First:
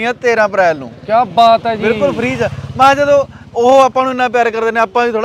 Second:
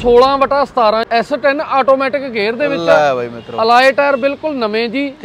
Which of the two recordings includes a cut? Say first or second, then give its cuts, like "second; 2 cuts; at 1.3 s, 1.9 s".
second; 1 cut; at 1.1 s